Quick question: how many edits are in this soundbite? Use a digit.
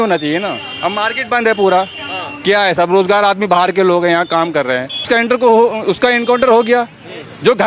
1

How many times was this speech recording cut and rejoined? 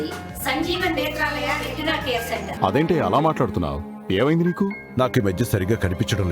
1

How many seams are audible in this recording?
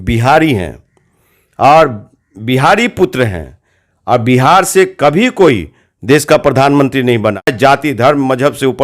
1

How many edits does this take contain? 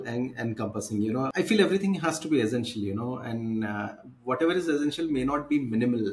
1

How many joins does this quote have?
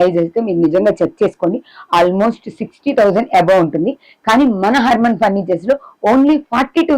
0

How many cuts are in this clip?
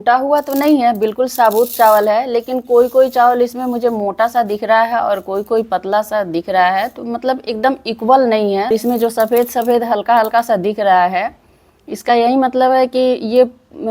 1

